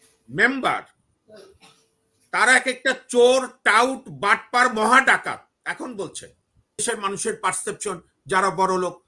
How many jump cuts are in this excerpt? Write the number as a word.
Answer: one